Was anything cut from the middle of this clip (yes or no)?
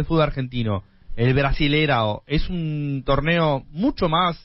no